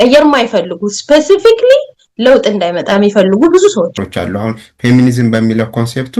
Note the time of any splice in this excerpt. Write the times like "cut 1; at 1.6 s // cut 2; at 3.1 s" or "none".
cut 1; at 4.0 s